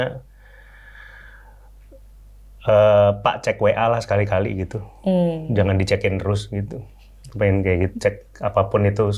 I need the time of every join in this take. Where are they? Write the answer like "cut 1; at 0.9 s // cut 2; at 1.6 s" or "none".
none